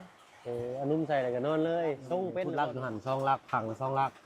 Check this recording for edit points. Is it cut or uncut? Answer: cut